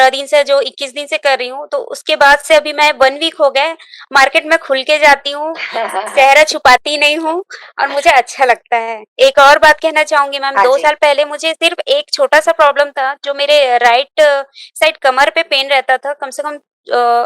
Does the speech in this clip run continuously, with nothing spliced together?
no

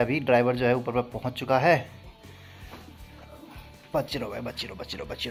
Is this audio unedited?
yes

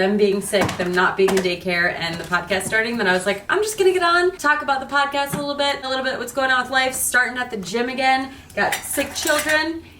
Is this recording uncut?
no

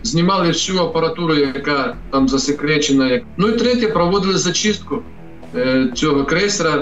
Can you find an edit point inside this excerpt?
yes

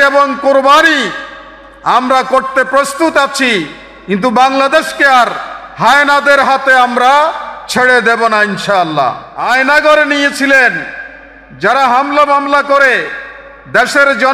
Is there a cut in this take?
yes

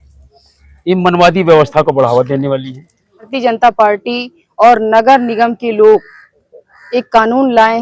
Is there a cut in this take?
yes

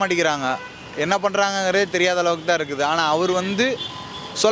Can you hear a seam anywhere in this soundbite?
no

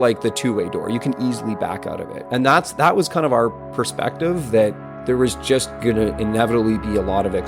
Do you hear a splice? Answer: yes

